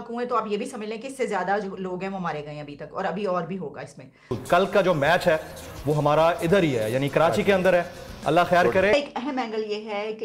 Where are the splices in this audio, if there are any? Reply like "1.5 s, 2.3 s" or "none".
4.4 s, 8.9 s